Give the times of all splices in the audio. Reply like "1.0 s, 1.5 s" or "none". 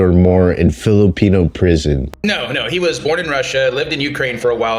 2.0 s